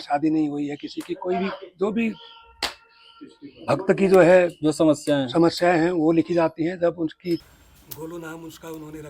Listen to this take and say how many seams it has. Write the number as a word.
one